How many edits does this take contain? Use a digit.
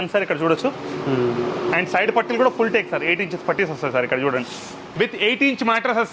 1